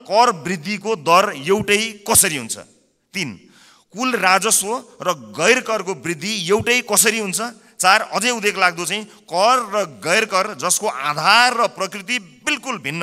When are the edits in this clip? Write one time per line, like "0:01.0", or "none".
none

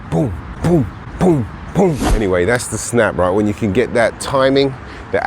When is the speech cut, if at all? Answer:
0:02.1

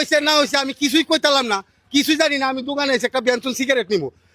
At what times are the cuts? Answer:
none

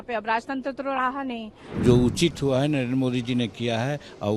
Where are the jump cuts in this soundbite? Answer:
0:01.6

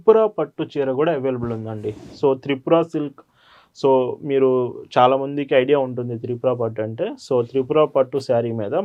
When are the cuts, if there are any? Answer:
none

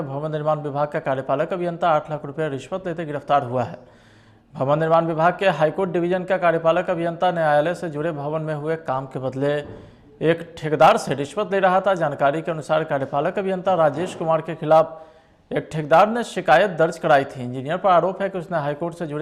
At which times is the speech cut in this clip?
none

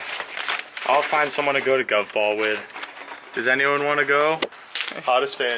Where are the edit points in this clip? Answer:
0:04.5

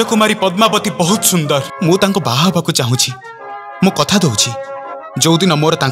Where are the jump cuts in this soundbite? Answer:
0:01.7

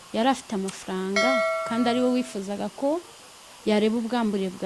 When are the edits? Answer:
none

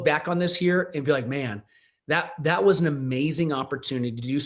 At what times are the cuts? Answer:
none

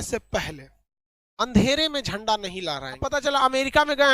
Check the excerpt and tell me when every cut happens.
0:03.0

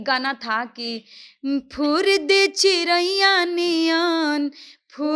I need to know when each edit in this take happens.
none

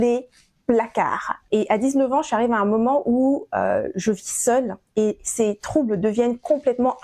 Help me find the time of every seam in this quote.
0:01.3

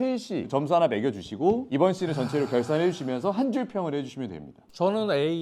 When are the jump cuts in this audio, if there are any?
0:04.5

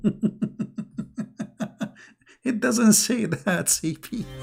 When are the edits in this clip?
none

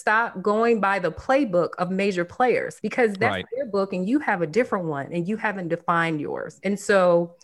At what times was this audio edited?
none

